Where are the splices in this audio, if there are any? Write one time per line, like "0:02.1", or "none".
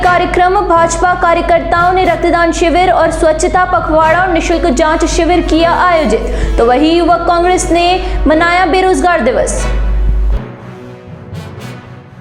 none